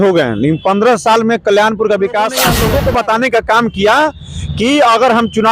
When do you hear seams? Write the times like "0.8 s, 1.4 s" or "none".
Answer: 2.5 s